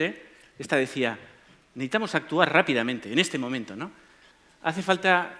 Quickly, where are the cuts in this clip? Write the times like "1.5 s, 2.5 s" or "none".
none